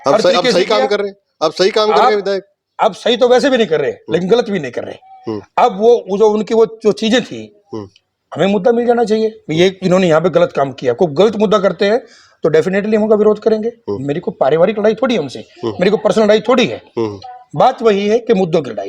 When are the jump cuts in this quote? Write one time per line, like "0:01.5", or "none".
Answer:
none